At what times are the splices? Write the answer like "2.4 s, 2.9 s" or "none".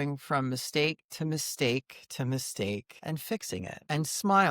3.2 s